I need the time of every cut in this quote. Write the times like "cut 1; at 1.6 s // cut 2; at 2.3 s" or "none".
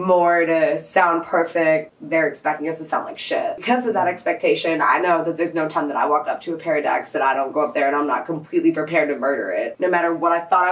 cut 1; at 1.9 s // cut 2; at 3.6 s // cut 3; at 9.7 s